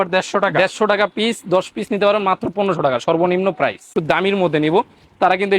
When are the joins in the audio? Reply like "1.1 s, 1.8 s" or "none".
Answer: 3.9 s